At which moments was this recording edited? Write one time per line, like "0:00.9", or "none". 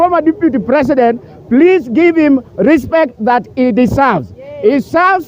none